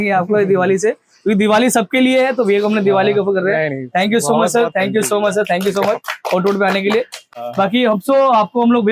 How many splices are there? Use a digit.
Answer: 0